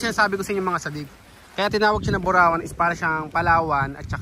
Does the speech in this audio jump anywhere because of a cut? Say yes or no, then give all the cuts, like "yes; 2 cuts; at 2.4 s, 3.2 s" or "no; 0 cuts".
no; 0 cuts